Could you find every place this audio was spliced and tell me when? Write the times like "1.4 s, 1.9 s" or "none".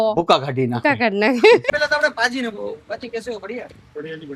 1.6 s